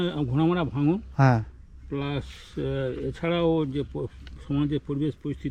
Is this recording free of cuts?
yes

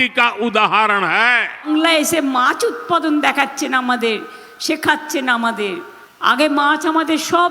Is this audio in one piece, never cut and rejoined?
no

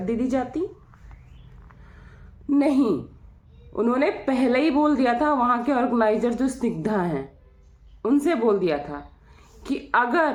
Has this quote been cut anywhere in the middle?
no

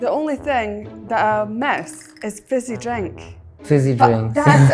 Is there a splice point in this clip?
yes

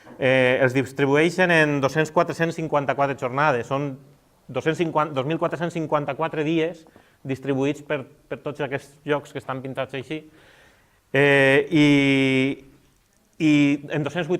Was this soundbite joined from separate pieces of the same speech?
yes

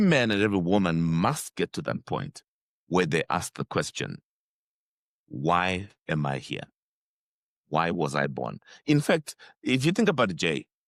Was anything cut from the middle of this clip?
no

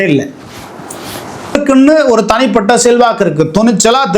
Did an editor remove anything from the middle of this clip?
yes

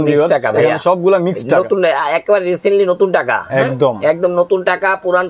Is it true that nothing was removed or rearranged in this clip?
yes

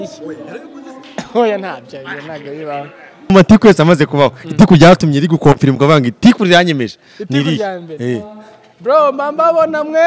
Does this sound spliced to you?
yes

